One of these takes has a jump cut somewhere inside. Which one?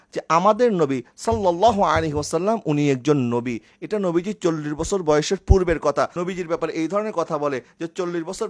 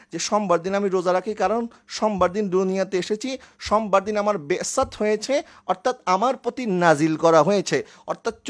first; 1 cut; at 6.2 s

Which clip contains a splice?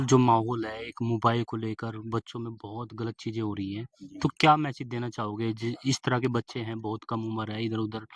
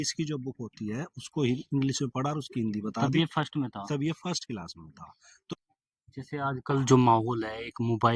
second; 1 cut; at 5.6 s

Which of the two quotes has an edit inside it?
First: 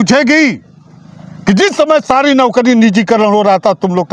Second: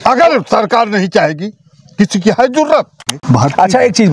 second; 1 cut; at 3.1 s

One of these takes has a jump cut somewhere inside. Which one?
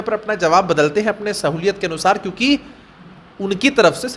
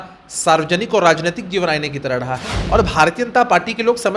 second; 1 cut; at 2.4 s

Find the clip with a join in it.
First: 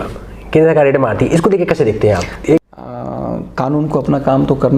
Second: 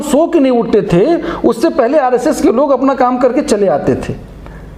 first; 1 cut; at 2.6 s

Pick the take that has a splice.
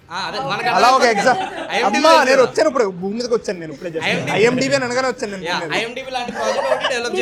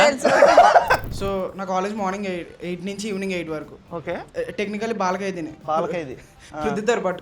second; 1 cut; at 1.1 s

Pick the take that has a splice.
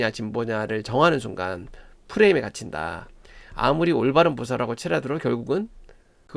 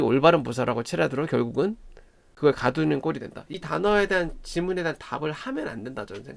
second; 1 cut; at 3.3 s

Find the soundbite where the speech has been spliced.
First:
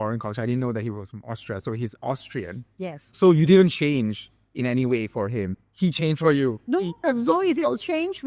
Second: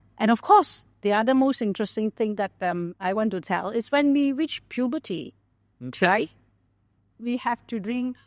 first; 1 cut; at 3.1 s

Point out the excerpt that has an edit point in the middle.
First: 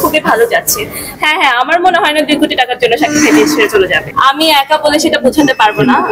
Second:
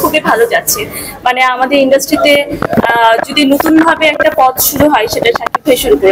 first; 2 cuts; at 1.2 s, 4.0 s

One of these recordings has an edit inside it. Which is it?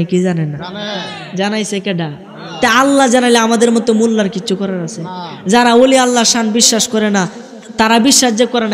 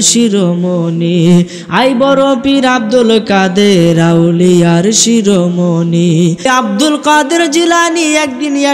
second; 1 cut; at 6.5 s

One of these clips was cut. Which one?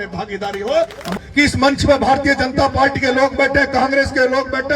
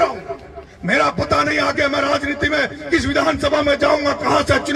first; 1 cut; at 1.1 s

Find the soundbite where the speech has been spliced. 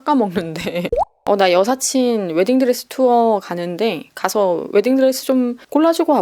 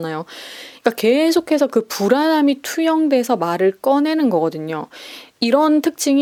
first; 1 cut; at 1.2 s

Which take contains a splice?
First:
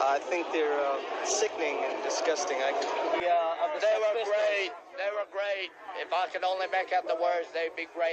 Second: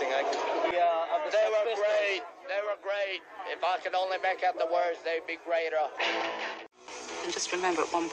second; 1 cut; at 6.7 s

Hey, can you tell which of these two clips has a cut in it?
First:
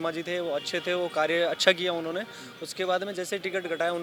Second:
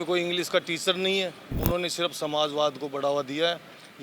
second; 1 cut; at 1.5 s

